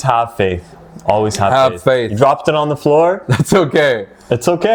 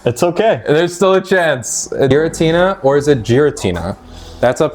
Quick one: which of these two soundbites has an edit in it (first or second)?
second